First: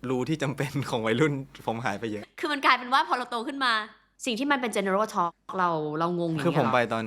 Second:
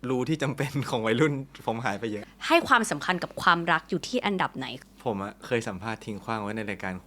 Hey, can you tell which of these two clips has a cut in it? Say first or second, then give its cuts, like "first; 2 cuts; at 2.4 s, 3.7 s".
second; 2 cuts; at 2.3 s, 4.7 s